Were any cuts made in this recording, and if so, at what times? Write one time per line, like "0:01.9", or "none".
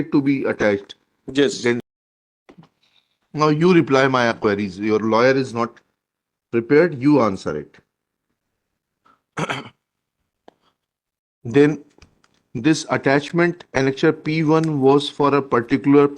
0:01.8